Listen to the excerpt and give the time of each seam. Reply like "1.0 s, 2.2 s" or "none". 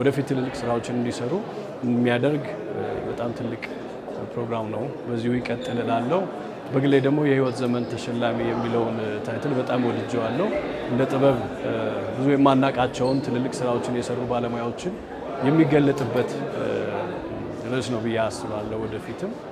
none